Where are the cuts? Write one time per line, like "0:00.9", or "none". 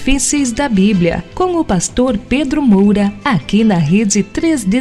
0:03.1